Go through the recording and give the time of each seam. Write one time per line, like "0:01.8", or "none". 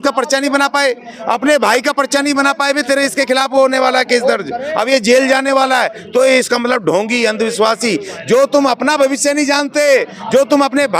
none